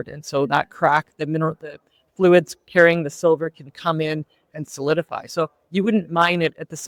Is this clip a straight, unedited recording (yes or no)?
yes